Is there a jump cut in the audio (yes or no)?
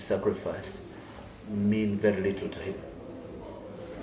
no